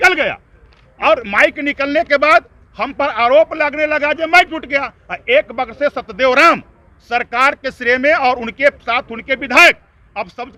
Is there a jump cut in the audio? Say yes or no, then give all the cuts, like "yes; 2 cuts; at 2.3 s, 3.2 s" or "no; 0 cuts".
no; 0 cuts